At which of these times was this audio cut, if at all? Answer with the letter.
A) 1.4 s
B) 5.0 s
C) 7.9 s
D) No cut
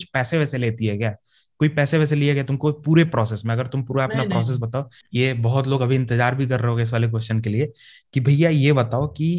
B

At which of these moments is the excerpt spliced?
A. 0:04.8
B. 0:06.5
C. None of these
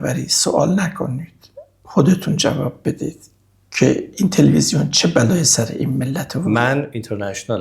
B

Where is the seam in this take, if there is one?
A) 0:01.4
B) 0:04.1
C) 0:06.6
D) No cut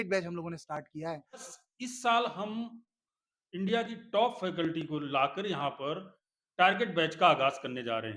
A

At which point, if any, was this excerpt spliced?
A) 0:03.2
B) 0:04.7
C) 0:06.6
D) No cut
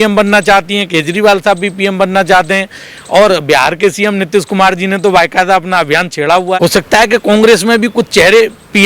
C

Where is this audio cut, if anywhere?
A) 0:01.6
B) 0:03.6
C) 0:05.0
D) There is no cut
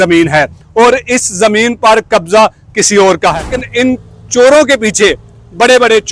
B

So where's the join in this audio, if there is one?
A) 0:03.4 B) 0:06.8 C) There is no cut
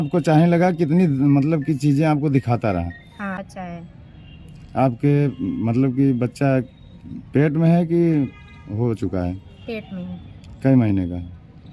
A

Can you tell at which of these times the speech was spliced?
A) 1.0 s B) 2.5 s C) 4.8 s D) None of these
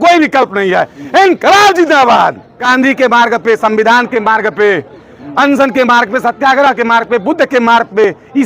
B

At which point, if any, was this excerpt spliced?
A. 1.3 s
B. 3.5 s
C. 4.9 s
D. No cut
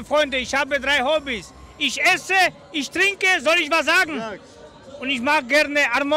B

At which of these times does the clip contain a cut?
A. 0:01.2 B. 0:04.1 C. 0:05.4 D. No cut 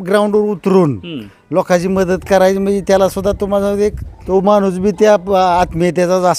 B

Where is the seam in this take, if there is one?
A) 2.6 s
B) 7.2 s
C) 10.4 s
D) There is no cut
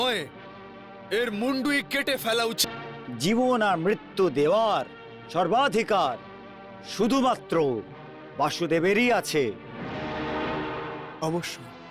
A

